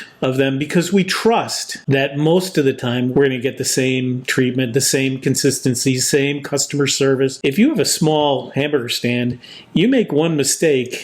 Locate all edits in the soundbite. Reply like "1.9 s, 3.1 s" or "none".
1.8 s, 3.1 s, 7.4 s